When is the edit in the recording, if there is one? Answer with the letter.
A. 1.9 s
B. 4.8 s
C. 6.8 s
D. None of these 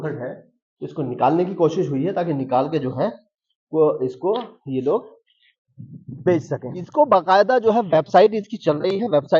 C